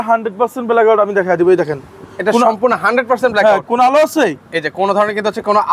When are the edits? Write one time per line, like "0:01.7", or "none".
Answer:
none